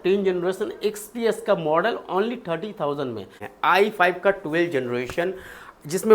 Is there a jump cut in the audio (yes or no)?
yes